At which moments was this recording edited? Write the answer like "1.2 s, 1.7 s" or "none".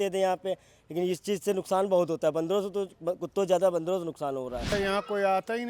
4.7 s